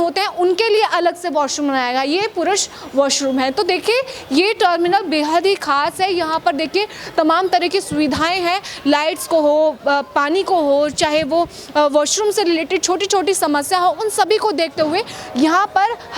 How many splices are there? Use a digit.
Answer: 0